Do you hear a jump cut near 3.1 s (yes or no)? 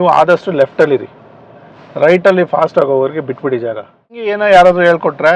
no